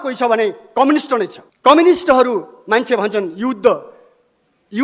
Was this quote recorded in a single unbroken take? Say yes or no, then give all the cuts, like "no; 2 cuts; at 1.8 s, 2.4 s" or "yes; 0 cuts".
no; 1 cut; at 1.4 s